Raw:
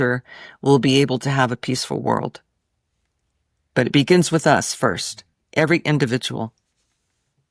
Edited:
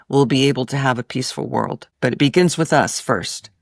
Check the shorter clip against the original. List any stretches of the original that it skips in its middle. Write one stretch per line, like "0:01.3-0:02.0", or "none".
0:02.4-0:03.6